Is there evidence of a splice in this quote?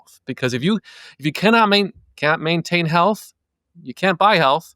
no; 0 cuts

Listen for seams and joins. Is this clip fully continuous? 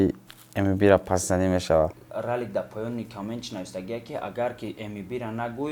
no; 1 cut; at 2.1 s

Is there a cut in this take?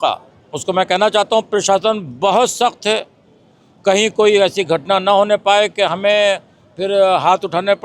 no; 0 cuts

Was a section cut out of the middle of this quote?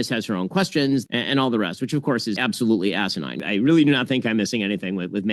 yes; 3 cuts; at 1.1 s, 2.4 s, 3.4 s

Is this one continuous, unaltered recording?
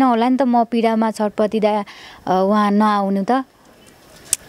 yes; 0 cuts

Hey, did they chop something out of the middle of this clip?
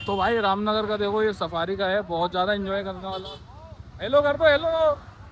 no; 0 cuts

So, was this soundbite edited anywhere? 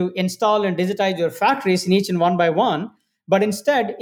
no; 0 cuts

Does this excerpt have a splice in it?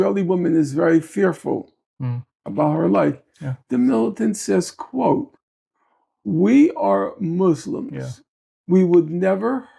no; 0 cuts

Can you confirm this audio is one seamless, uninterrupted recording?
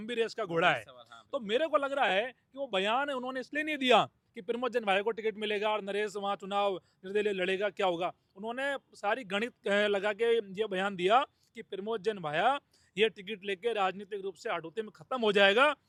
yes; 0 cuts

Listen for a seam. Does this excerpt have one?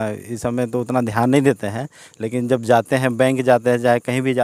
no; 0 cuts

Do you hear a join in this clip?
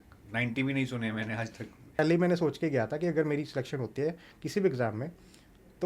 yes; 1 cut; at 2.0 s

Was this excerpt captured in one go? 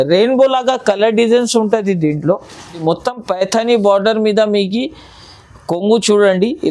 no; 1 cut; at 2.8 s

